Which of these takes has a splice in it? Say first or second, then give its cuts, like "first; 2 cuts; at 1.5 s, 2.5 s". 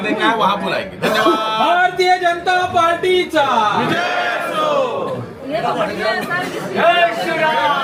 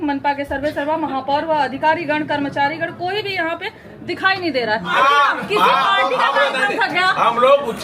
second; 1 cut; at 4.9 s